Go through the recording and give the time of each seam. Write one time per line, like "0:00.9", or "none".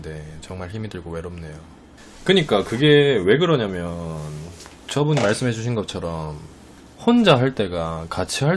none